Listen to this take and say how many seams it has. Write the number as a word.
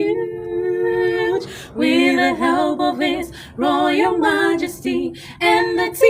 zero